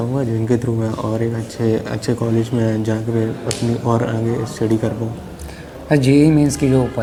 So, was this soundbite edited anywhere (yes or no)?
no